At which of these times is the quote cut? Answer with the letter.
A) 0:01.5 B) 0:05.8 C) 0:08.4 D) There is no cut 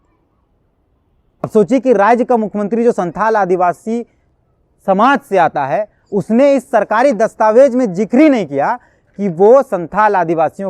A